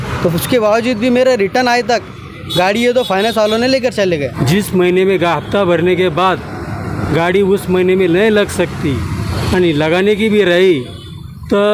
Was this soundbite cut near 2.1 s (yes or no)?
no